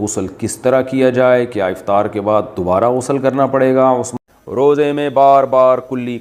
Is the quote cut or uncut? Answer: cut